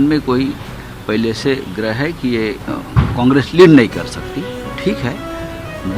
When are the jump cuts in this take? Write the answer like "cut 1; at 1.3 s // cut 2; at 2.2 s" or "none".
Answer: none